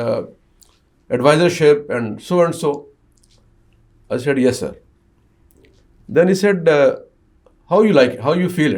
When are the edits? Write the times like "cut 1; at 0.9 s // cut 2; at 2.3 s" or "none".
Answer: none